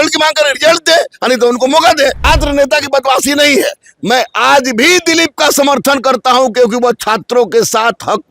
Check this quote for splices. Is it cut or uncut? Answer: cut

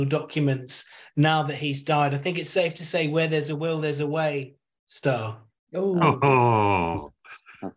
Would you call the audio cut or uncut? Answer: uncut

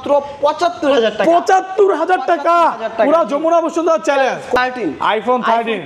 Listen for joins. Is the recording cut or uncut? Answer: cut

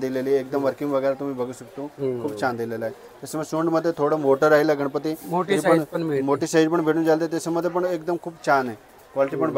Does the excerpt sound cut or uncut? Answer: uncut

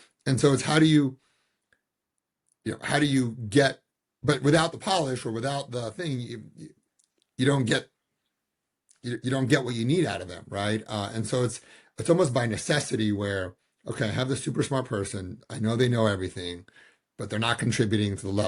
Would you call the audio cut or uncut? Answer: uncut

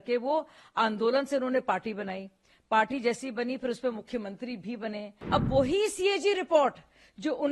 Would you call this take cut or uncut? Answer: cut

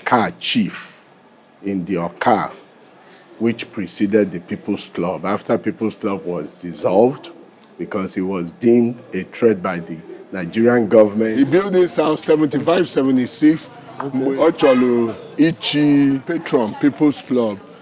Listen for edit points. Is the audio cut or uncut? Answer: cut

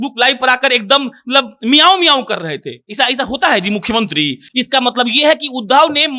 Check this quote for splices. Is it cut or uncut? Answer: uncut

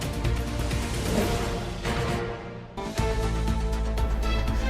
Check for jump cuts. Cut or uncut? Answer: cut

